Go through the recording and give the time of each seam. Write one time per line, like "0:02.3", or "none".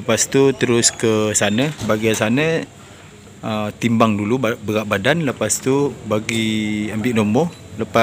none